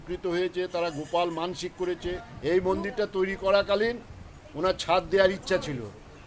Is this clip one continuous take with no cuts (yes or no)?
no